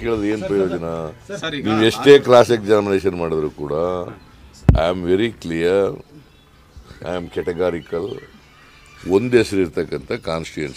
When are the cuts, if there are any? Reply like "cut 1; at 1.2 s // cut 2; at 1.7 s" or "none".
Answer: none